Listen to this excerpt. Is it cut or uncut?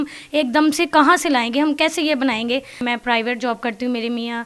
cut